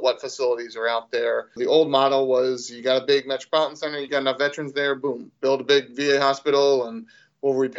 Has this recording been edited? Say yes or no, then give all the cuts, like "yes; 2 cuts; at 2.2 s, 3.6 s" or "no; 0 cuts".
yes; 2 cuts; at 1.6 s, 4.0 s